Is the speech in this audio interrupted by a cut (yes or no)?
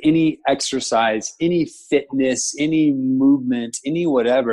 no